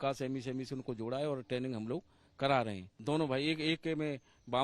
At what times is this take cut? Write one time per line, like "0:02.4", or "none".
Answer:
0:02.9